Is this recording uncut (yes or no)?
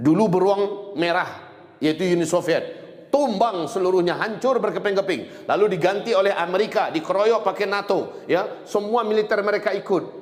yes